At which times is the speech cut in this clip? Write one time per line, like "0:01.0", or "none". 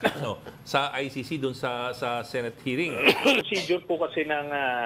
0:03.5